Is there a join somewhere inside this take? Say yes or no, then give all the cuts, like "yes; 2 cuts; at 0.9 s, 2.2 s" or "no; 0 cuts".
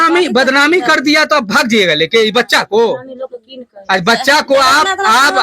no; 0 cuts